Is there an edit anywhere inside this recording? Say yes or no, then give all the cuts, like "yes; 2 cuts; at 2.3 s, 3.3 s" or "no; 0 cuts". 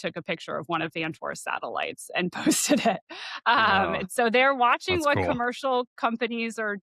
no; 0 cuts